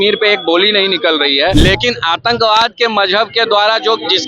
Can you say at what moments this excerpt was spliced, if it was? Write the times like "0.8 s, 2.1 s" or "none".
1.5 s

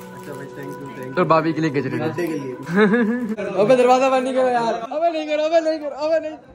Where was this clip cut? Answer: 3.4 s

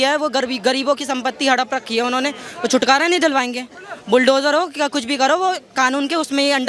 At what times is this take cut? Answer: none

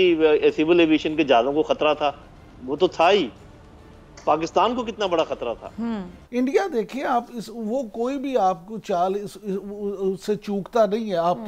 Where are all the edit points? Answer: 6.1 s

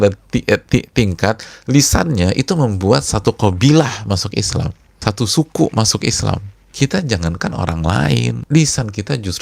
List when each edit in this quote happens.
4.8 s, 6.6 s, 8.4 s

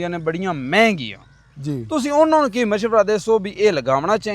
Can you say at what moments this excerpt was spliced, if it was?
none

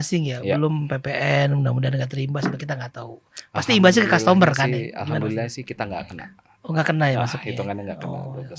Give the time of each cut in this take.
none

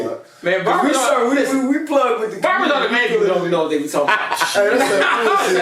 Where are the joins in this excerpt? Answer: none

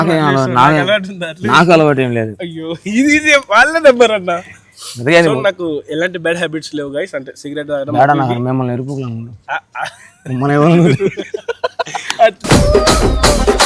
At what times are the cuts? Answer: none

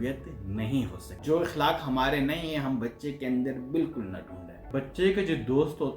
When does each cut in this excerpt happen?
1.1 s, 4.7 s

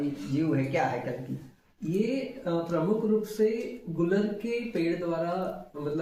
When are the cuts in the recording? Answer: none

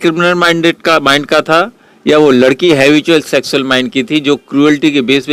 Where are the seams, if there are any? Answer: none

